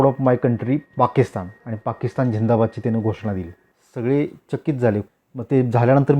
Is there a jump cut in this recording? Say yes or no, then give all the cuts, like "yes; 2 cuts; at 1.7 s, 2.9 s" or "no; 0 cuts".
yes; 1 cut; at 5.1 s